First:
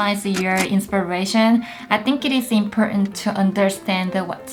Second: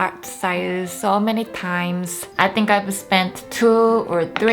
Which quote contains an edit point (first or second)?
second